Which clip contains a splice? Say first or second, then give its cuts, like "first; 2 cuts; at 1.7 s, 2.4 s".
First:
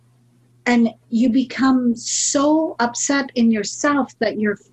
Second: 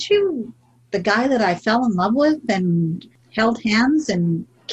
second; 1 cut; at 3.0 s